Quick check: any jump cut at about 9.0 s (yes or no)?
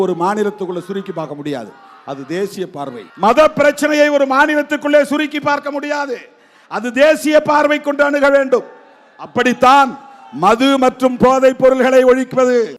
no